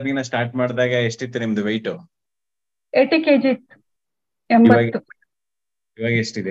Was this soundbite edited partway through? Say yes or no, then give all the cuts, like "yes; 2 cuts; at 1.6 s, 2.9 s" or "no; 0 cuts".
no; 0 cuts